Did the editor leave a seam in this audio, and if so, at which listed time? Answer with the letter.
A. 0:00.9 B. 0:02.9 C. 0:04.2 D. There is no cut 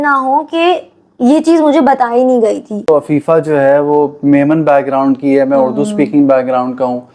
B